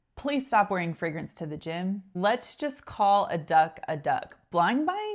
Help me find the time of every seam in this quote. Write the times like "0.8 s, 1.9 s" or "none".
2.0 s